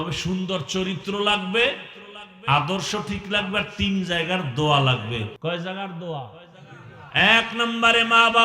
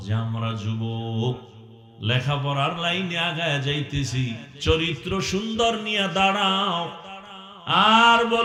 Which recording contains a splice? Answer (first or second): first